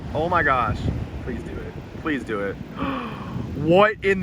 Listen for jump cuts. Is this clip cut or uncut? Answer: cut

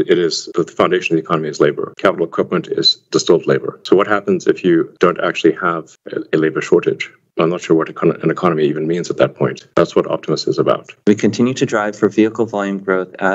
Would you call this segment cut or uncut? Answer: cut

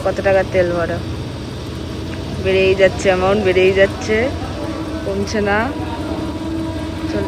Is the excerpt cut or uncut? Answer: uncut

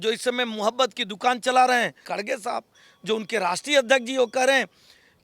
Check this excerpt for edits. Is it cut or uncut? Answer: cut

